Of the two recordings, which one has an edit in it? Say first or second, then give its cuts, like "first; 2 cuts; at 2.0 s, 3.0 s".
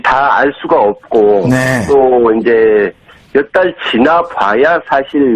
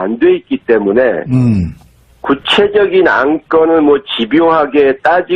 second; 1 cut; at 1.0 s